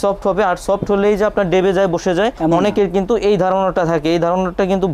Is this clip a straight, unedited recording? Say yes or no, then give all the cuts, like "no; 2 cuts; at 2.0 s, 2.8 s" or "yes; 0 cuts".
yes; 0 cuts